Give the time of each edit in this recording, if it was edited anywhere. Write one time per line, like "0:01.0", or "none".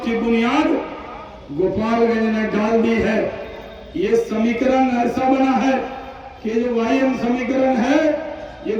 none